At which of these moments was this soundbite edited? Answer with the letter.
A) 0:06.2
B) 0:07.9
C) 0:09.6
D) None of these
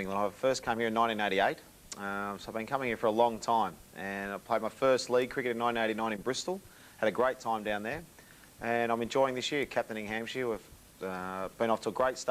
A